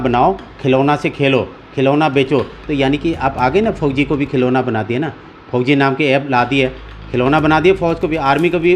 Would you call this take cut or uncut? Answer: uncut